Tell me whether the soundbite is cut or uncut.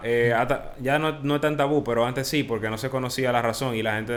uncut